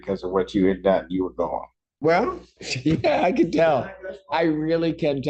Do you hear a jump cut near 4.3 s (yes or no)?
no